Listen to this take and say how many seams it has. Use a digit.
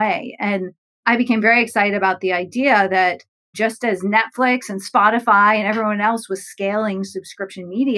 1